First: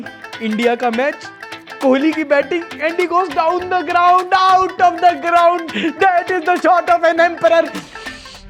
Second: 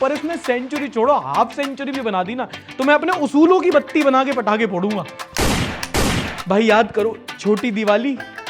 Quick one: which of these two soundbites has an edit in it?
second; 2 cuts; at 5.2 s, 6.3 s

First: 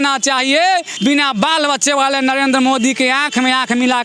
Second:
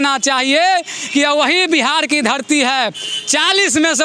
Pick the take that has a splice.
first; 1 cut; at 0.9 s

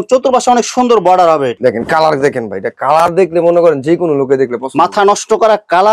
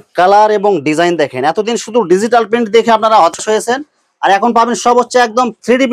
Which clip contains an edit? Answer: first; 1 cut; at 1.5 s

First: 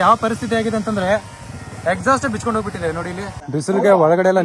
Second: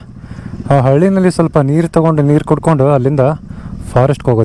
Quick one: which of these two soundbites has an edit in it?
first; 1 cut; at 3.4 s

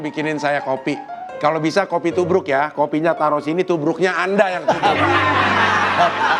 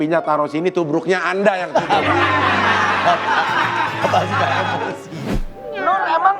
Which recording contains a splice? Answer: second; 1 cut; at 5.4 s

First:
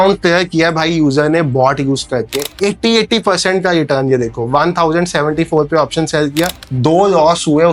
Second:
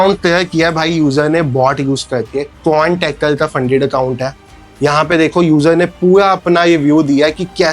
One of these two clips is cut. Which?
first; 2 cuts; at 2.4 s, 6.6 s

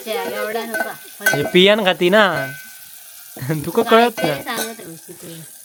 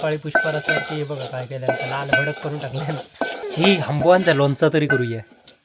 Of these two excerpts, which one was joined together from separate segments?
second; 1 cut; at 3.5 s

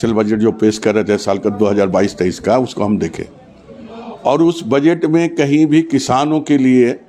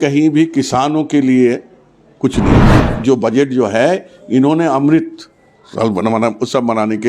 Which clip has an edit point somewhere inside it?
second; 1 cut; at 2.7 s

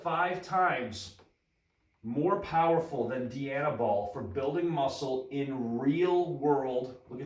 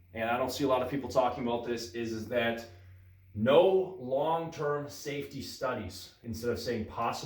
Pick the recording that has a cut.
second; 1 cut; at 6.2 s

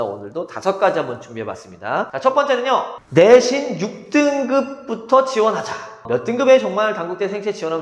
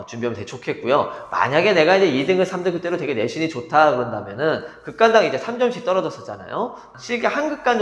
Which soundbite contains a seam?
first; 2 cuts; at 2.1 s, 3.0 s

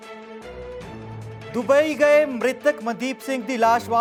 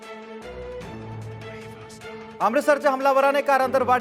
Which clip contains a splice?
second; 1 cut; at 1.5 s

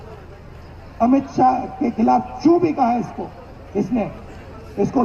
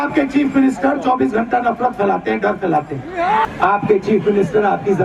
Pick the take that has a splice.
second; 1 cut; at 3.5 s

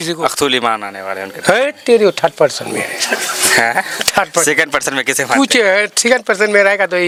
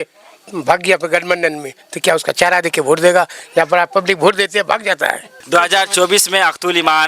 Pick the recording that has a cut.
second; 1 cut; at 5.3 s

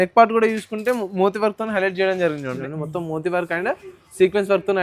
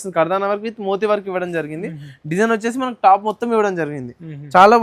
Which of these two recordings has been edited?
first; 1 cut; at 2.7 s

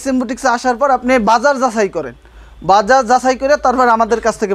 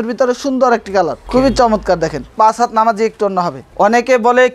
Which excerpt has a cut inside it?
second; 3 cuts; at 1.2 s, 2.3 s, 3.6 s

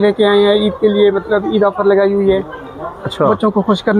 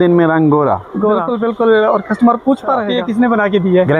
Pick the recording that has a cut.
second; 2 cuts; at 1.3 s, 3.0 s

